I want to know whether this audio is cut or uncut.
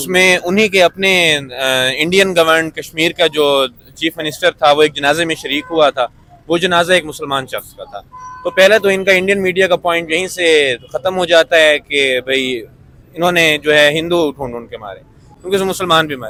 uncut